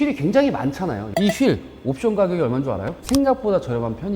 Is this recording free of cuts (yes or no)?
no